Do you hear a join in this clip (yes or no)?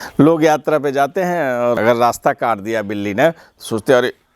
yes